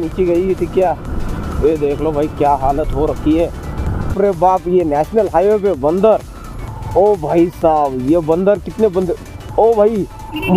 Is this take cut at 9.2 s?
no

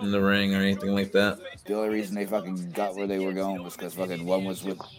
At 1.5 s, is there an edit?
yes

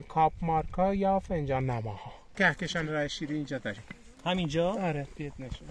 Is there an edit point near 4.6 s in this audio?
no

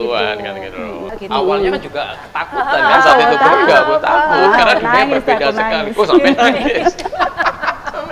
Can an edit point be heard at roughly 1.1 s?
yes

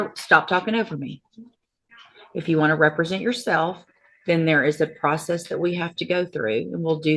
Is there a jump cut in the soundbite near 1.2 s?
no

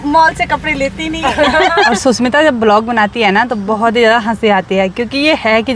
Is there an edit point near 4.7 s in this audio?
no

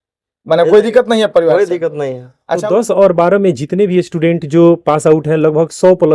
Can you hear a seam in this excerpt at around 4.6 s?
no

